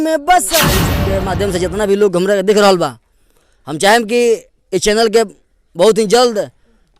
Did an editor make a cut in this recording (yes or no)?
yes